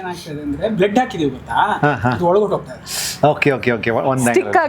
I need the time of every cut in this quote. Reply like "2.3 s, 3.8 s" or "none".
none